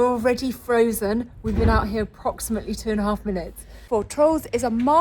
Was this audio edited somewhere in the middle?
yes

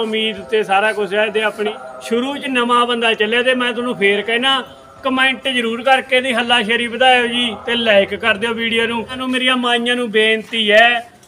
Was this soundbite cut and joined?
yes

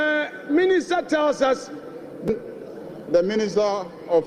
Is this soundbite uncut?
no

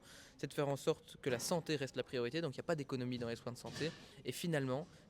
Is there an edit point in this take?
yes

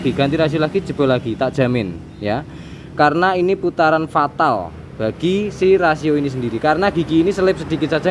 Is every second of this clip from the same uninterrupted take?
yes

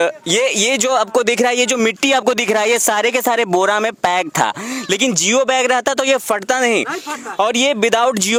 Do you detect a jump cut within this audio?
no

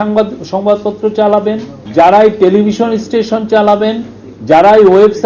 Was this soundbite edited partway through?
yes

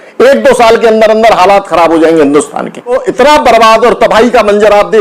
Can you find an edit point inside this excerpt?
yes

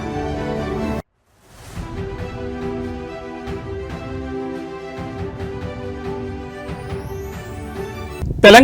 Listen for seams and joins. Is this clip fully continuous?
yes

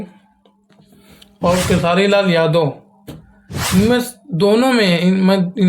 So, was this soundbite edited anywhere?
no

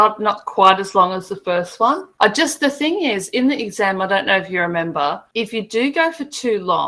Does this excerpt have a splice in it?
yes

